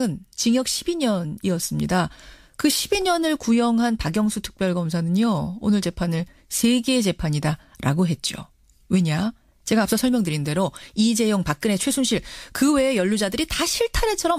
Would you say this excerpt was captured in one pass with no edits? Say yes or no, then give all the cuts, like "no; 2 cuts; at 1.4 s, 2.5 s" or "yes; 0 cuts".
yes; 0 cuts